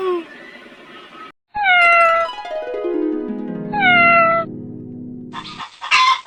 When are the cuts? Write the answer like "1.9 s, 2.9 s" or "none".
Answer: none